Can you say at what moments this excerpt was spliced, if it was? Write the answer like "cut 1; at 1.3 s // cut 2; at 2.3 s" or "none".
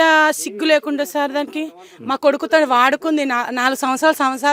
none